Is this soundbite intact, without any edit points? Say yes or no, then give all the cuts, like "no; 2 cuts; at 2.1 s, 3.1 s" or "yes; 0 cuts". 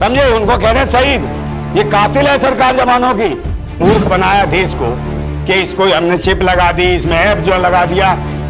no; 1 cut; at 3.7 s